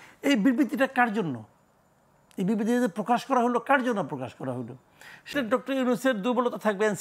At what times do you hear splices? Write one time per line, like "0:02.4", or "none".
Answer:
0:05.3

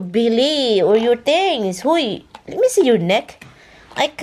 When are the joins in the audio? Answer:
none

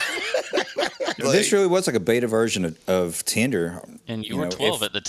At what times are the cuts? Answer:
0:01.1
0:04.0

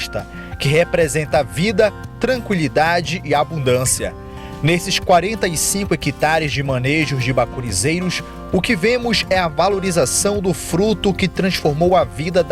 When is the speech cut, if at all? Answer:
none

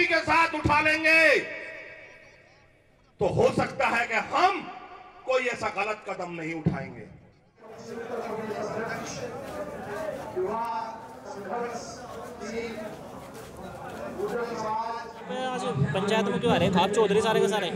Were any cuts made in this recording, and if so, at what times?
none

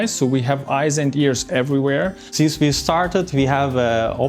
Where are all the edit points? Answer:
0:02.2

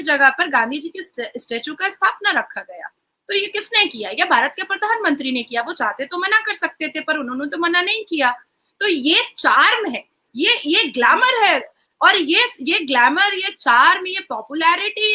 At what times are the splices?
none

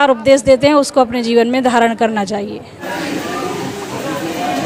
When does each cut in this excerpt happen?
none

